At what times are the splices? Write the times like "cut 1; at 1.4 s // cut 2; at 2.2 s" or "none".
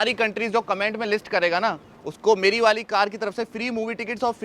none